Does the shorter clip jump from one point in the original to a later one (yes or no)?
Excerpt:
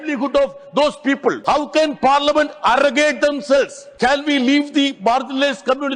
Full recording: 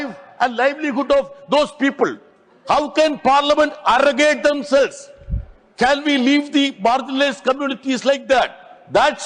yes